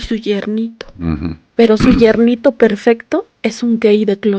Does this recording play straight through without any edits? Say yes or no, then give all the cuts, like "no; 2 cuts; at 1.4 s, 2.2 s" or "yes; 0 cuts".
no; 2 cuts; at 1.4 s, 3.3 s